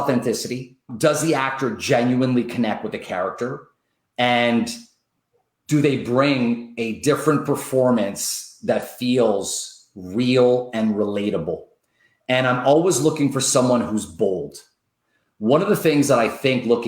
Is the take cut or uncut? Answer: cut